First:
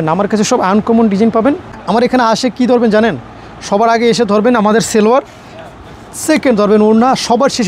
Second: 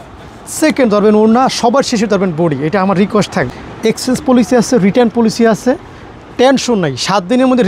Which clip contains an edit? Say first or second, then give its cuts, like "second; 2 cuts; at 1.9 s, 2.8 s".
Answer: second; 1 cut; at 3.5 s